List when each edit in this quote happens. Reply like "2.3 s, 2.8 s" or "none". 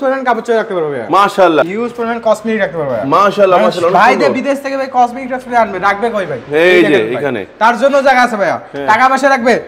1.6 s